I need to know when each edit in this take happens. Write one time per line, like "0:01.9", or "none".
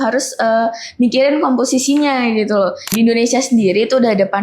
0:02.9